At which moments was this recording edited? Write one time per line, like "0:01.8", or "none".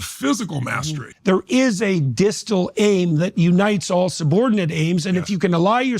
0:01.1

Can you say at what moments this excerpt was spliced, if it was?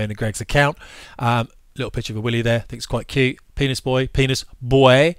none

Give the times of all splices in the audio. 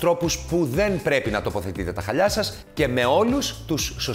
none

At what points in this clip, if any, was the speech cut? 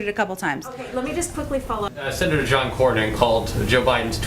0:01.9

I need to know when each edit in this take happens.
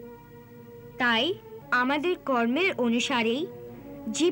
0:01.6

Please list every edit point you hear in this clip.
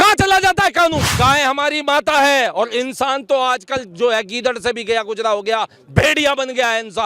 0:01.1

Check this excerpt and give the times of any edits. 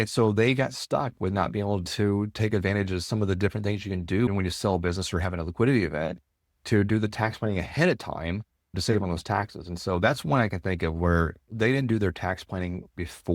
none

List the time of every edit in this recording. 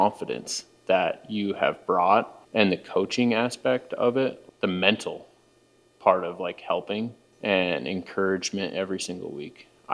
0:02.4
0:04.4
0:07.2

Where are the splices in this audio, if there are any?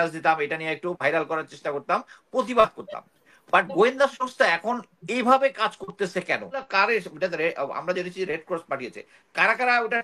0:06.7

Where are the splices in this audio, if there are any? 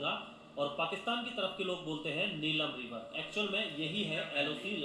0:03.2

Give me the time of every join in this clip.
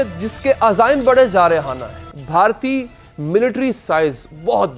0:02.2

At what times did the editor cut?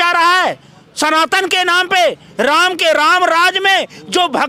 none

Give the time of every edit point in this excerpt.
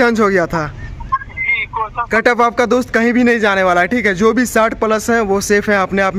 0:02.0

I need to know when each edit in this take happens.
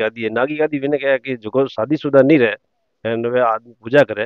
none

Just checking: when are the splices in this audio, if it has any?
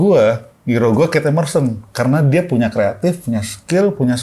none

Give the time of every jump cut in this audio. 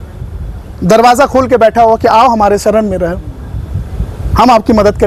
none

